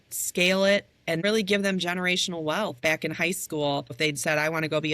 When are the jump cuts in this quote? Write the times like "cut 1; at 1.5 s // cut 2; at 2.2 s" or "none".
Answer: cut 1; at 1.2 s // cut 2; at 2.8 s // cut 3; at 4.0 s